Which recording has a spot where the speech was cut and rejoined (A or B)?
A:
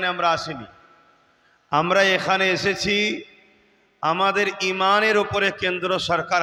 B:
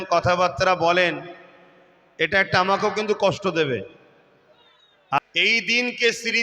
B